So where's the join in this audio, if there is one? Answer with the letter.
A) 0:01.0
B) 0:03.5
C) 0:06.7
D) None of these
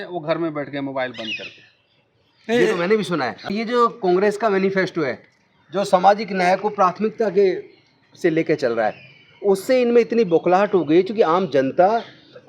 B